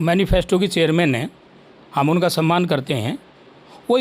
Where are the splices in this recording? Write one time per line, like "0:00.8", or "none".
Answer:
none